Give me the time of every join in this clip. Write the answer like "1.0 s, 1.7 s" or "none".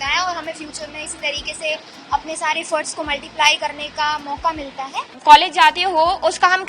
5.1 s

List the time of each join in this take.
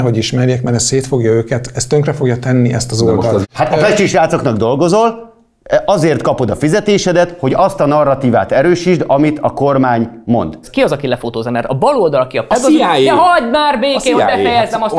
3.4 s, 10.6 s

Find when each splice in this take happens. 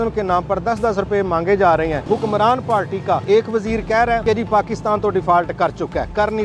2.0 s, 3.2 s, 4.2 s

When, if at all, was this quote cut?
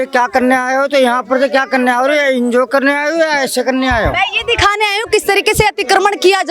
none

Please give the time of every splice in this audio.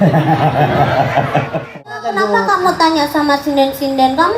1.8 s

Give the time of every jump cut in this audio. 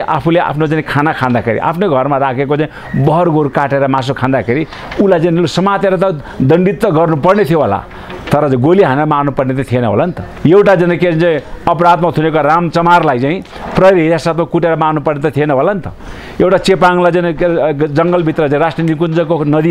10.3 s

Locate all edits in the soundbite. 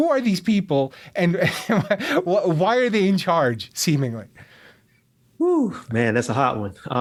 none

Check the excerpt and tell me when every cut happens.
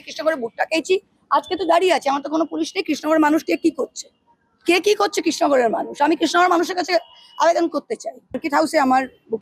8.4 s

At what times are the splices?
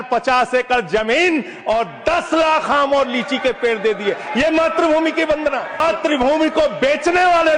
5.8 s

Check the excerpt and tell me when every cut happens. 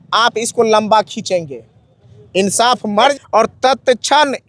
3.1 s

